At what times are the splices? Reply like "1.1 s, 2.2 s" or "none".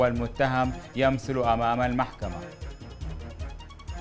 2.4 s